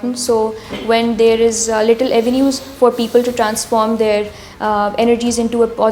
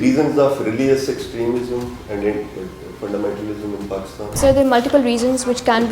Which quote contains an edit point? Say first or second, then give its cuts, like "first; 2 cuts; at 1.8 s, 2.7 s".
second; 1 cut; at 4.4 s